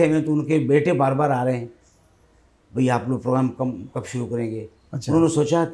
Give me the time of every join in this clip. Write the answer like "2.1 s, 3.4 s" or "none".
none